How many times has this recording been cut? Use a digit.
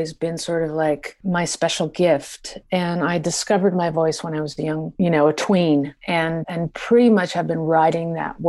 3